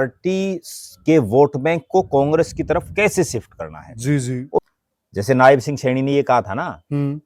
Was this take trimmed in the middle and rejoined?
yes; 1 cut; at 4.6 s

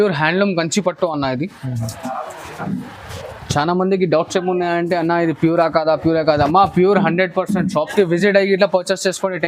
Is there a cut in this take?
no; 0 cuts

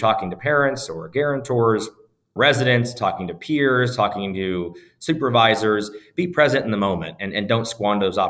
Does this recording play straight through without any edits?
yes; 0 cuts

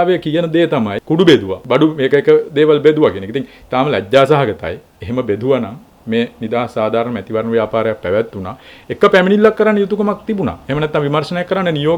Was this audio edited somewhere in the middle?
yes; 2 cuts; at 1.0 s, 1.6 s

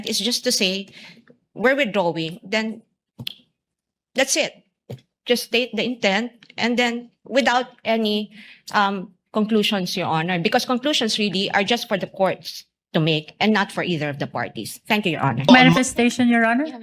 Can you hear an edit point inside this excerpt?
yes; 1 cut; at 15.5 s

